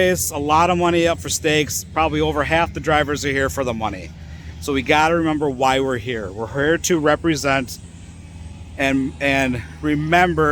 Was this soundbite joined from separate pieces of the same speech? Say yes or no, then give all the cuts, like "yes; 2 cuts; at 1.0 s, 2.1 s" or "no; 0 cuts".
no; 0 cuts